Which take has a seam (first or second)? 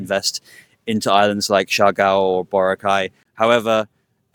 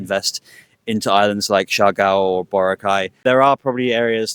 second